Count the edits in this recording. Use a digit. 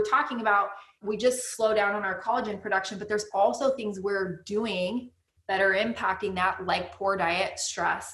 2